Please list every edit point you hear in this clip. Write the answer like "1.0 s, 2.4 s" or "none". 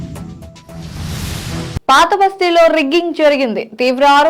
1.8 s